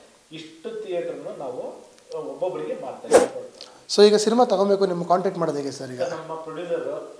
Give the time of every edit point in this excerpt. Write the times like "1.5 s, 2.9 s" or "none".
3.3 s